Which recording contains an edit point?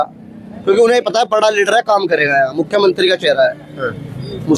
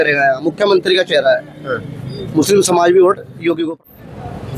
second; 1 cut; at 3.6 s

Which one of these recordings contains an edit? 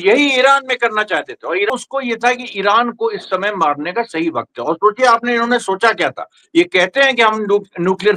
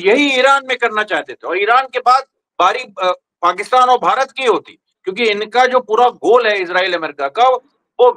first; 1 cut; at 1.7 s

